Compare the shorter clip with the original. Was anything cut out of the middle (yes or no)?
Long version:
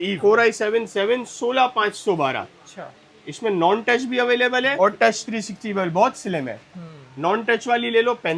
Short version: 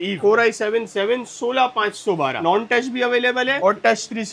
yes